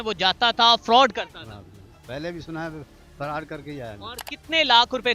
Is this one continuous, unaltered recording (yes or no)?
yes